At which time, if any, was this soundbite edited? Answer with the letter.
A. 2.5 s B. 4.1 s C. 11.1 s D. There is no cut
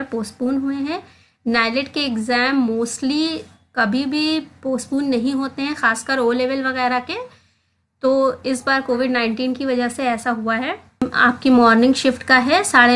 C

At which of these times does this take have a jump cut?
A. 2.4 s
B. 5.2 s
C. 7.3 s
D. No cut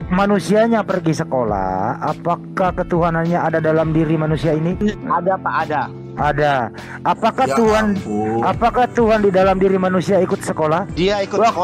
D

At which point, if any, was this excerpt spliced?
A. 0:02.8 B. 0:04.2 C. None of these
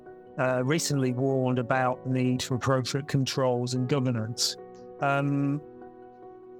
C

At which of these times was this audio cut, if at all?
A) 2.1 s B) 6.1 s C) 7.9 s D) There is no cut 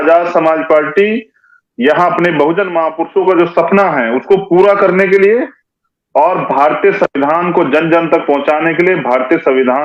D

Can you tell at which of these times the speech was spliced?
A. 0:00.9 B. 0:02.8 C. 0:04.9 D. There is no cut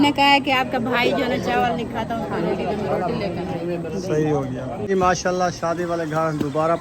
C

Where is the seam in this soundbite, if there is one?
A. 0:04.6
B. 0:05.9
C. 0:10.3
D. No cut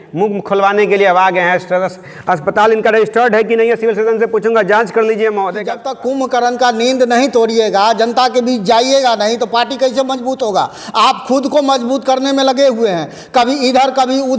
B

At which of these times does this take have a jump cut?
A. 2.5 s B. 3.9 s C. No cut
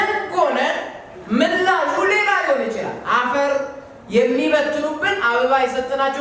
C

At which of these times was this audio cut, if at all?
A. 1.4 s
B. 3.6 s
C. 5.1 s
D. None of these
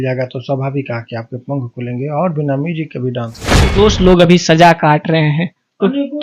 B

